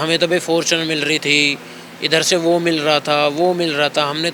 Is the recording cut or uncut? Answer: uncut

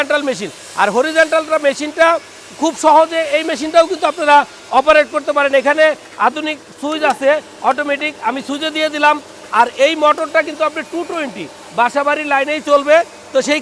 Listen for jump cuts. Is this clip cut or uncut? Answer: uncut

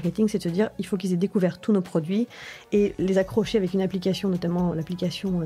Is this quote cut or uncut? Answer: uncut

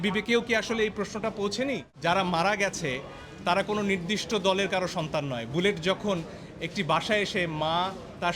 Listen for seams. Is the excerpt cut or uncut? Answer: cut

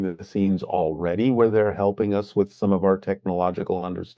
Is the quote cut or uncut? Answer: uncut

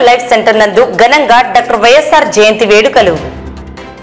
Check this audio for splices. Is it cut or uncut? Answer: uncut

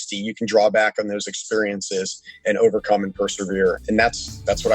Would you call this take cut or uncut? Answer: cut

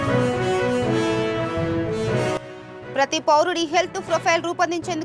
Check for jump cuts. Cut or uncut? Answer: cut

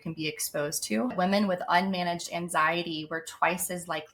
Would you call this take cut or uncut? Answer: cut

